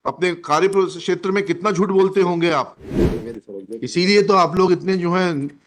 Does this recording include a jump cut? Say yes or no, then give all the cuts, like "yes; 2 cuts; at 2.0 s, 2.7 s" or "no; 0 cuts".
yes; 1 cut; at 3.3 s